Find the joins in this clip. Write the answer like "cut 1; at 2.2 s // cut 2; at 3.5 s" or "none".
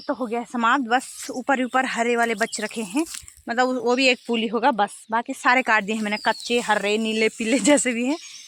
none